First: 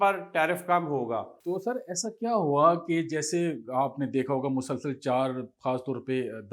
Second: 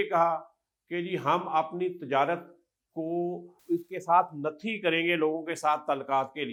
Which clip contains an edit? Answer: first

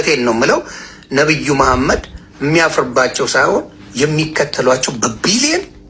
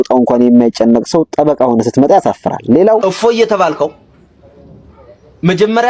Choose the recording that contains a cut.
second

